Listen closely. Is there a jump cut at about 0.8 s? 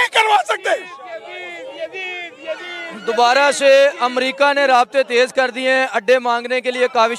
no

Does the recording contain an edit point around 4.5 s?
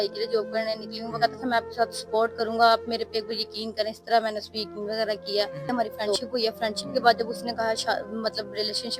no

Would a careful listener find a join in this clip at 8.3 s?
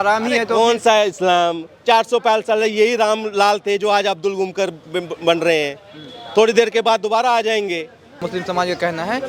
yes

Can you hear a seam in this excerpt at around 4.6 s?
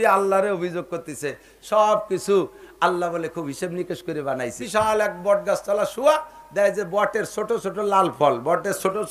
yes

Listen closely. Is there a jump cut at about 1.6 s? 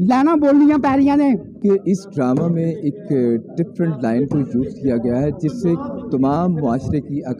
yes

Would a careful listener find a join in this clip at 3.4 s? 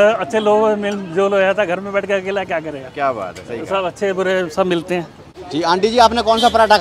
no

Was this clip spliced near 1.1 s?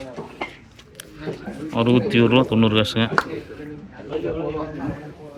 no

